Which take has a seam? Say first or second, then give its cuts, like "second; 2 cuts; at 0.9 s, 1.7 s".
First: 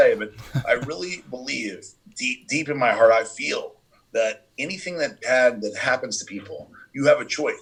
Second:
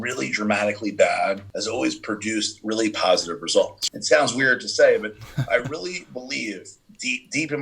second; 2 cuts; at 1.5 s, 3.8 s